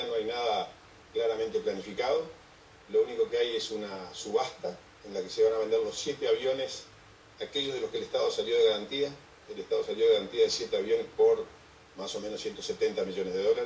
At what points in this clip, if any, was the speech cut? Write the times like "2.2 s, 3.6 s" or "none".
none